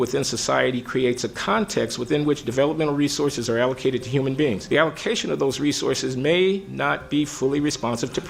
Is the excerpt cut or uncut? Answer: cut